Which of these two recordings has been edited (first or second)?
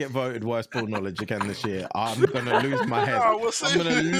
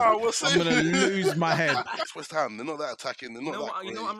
second